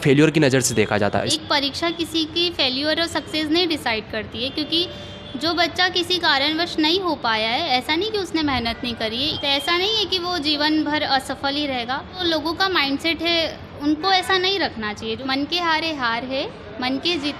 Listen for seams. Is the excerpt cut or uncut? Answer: cut